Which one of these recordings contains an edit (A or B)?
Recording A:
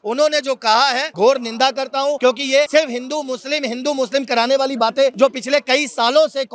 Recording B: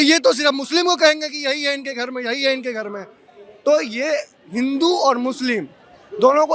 A